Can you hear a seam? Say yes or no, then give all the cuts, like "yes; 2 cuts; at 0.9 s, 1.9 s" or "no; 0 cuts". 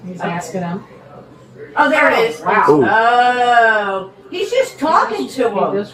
no; 0 cuts